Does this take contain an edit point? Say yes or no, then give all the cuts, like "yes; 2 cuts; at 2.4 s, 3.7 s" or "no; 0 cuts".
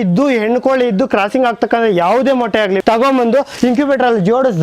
yes; 1 cut; at 2.8 s